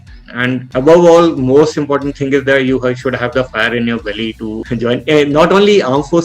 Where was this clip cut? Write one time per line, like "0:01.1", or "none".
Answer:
0:04.6